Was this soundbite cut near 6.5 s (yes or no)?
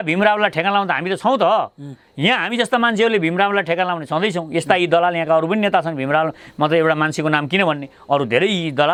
no